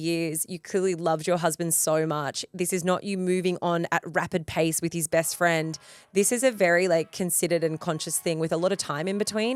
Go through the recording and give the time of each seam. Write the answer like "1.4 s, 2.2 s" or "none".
none